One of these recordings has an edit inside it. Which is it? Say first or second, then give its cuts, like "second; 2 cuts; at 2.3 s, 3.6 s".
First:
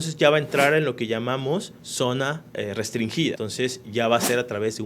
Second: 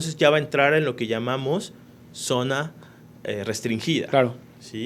first; 2 cuts; at 1.8 s, 2.9 s